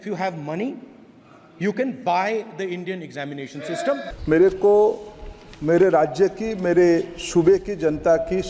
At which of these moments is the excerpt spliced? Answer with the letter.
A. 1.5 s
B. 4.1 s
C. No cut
B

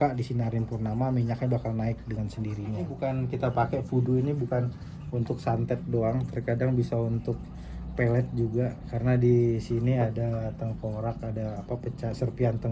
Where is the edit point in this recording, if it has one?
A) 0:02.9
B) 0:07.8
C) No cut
A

